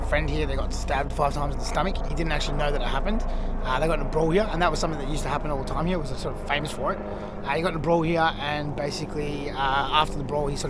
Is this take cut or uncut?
uncut